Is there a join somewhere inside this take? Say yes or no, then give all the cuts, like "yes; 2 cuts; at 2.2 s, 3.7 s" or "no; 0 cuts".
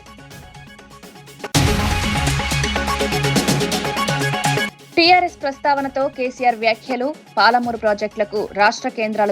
yes; 1 cut; at 1.2 s